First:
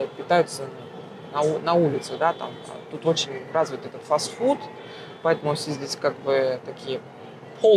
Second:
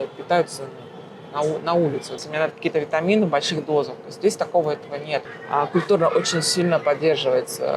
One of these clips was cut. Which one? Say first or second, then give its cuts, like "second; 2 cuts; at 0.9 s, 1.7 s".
second; 2 cuts; at 2.1 s, 5.3 s